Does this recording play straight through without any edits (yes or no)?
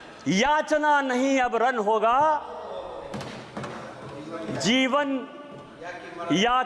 yes